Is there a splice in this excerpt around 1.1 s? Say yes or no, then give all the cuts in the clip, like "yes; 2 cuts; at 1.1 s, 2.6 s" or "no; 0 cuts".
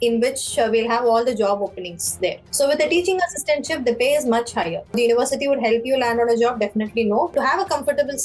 no; 3 cuts; at 2.4 s, 5.0 s, 7.3 s